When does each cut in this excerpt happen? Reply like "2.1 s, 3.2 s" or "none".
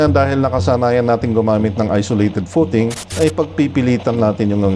3.0 s